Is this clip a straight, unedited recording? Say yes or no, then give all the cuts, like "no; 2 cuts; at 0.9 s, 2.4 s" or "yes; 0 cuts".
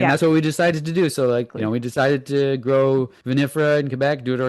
no; 2 cuts; at 1.5 s, 3.2 s